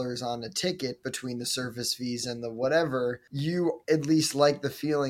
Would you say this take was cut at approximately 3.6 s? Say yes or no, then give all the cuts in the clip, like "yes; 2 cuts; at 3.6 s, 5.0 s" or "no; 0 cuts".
yes; 1 cut; at 3.6 s